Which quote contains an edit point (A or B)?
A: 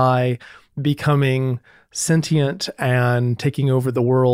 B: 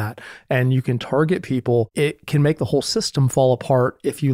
B